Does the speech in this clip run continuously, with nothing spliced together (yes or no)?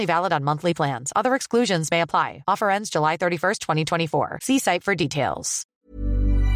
no